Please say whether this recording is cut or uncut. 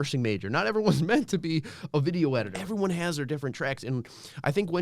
cut